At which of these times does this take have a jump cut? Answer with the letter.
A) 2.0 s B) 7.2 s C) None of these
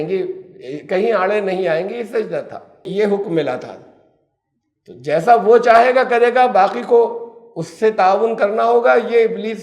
C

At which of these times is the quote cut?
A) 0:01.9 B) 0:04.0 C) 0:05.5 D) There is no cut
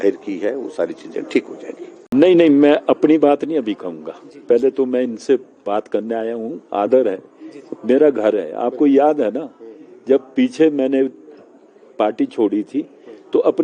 A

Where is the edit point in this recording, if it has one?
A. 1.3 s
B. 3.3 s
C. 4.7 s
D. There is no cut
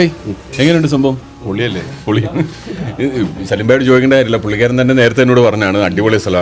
A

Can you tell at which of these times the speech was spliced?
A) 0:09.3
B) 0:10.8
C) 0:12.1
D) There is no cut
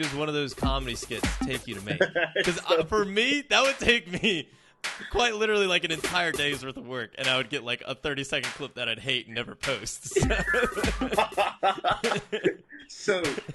D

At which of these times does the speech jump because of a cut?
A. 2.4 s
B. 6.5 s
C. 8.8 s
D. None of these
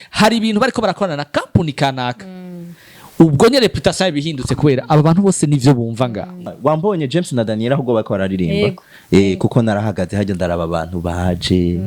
B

